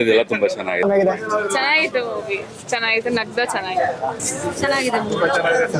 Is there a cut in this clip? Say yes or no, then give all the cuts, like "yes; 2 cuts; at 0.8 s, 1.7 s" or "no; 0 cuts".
yes; 2 cuts; at 0.8 s, 4.2 s